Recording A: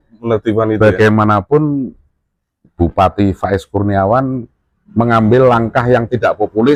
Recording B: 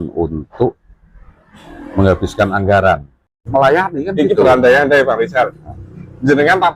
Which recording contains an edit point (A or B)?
B